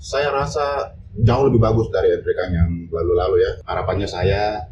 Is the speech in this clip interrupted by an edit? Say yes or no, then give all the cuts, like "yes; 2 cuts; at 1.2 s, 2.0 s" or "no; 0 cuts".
yes; 1 cut; at 3.6 s